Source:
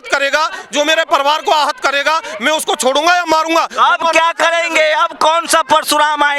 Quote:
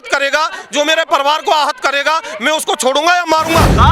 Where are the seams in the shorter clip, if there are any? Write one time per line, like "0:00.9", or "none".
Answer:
none